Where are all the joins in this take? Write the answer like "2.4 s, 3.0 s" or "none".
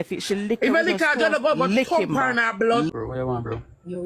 2.9 s